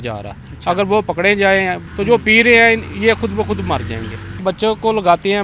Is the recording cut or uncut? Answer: cut